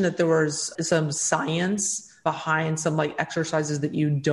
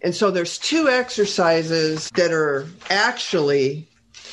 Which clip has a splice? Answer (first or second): first